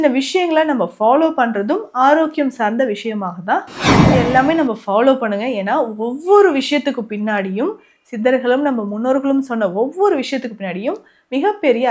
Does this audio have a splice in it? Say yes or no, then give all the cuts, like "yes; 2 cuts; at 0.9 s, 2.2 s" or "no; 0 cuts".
yes; 1 cut; at 4.0 s